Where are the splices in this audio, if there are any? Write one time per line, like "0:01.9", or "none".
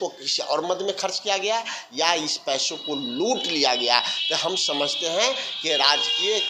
none